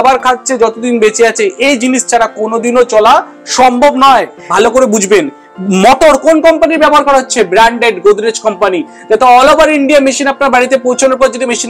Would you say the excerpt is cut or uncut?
cut